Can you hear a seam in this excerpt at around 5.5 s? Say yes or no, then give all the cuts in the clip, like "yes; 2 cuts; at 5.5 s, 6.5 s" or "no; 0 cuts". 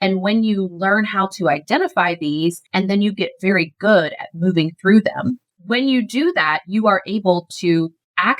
yes; 1 cut; at 5.5 s